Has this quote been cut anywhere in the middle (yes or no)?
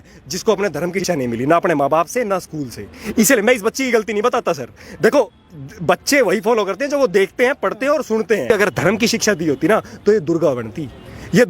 yes